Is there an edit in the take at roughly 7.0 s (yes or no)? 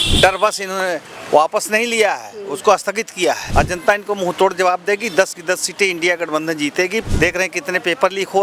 yes